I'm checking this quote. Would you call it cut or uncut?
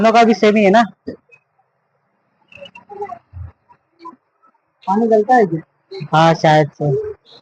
uncut